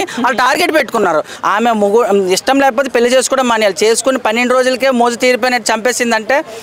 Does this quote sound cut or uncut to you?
cut